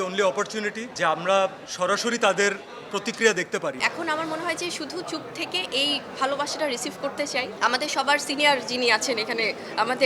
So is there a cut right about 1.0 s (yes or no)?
no